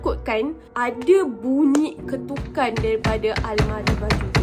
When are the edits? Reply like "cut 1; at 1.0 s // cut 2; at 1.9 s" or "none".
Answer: none